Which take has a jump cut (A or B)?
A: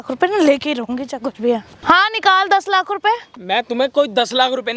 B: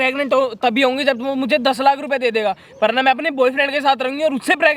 A